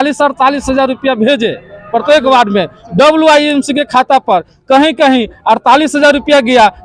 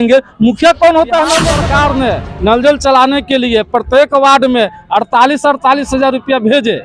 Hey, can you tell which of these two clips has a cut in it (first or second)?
second